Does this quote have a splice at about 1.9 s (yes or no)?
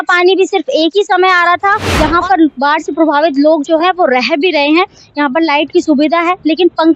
yes